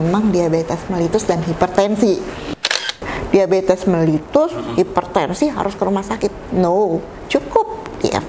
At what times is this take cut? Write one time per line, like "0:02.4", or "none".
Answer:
0:02.6